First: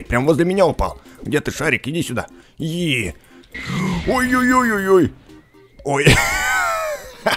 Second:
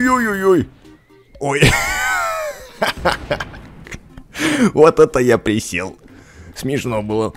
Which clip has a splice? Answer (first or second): first